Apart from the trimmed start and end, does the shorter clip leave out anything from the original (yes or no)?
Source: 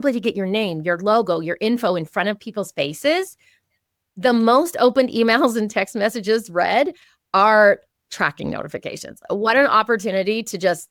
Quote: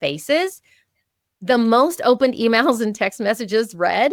no